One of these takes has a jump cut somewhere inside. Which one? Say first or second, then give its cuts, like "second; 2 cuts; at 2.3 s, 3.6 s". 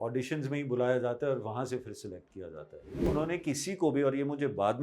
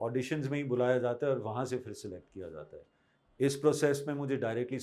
first; 1 cut; at 3.1 s